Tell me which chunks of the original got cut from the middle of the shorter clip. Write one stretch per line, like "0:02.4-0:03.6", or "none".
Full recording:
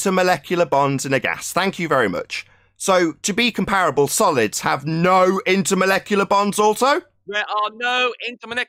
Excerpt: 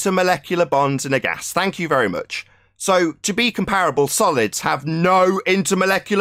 none